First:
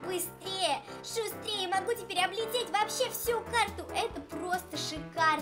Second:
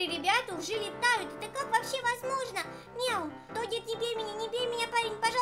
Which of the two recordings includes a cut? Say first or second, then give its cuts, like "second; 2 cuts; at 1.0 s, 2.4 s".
second; 1 cut; at 3.5 s